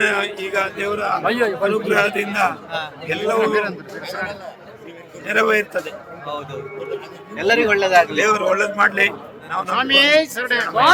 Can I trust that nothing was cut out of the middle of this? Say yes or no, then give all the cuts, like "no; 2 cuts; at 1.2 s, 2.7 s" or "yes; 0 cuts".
yes; 0 cuts